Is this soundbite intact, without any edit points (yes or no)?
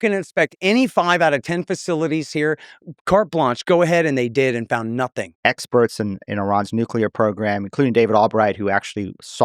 no